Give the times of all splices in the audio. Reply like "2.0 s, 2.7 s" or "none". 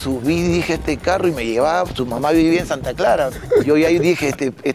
3.4 s